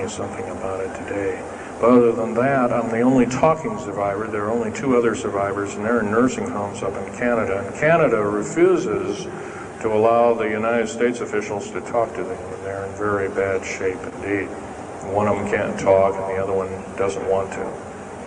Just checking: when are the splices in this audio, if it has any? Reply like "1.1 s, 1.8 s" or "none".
7.6 s